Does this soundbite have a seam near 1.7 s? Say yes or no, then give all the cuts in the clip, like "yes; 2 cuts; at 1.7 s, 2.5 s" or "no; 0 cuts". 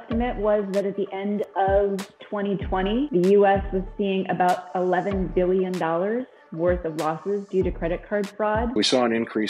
no; 2 cuts; at 3.1 s, 8.8 s